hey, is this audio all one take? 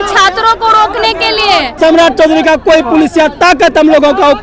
no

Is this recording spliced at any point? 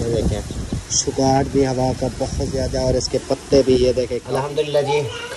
yes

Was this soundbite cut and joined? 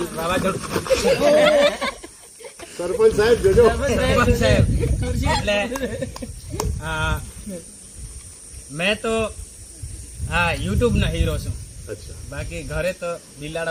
no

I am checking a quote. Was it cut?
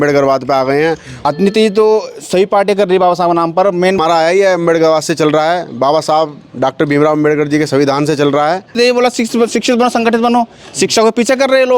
yes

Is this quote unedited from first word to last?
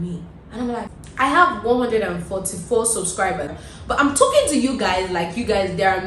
no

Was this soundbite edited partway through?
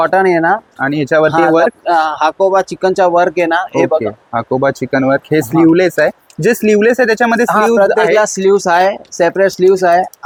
no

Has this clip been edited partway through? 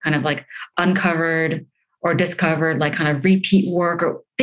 no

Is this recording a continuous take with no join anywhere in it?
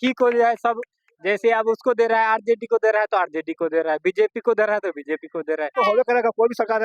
no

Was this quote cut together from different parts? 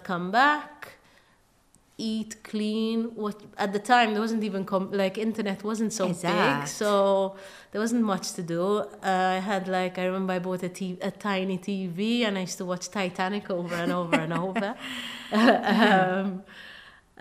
no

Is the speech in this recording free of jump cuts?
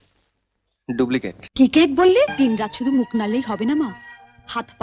no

